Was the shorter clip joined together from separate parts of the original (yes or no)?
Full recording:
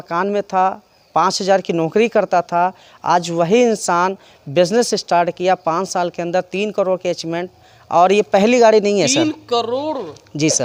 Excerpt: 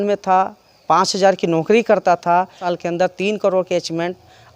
yes